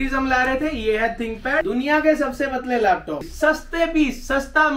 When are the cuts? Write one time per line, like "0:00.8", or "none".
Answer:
0:01.7
0:03.3